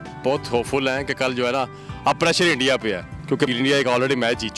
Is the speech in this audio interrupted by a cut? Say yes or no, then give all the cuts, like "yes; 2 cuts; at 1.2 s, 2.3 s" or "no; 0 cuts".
yes; 1 cut; at 3.4 s